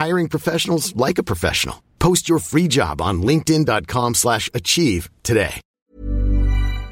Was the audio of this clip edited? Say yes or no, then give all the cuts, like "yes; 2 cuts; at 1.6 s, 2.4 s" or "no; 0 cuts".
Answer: yes; 1 cut; at 5.7 s